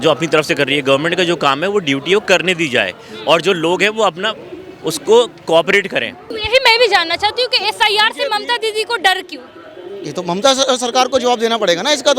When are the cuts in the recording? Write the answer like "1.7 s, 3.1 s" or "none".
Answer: 6.3 s